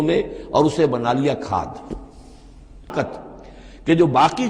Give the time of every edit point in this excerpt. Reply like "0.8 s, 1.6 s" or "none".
2.9 s